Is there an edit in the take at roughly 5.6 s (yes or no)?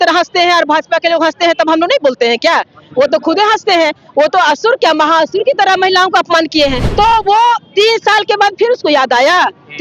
no